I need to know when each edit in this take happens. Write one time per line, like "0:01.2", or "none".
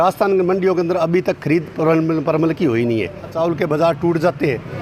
0:03.3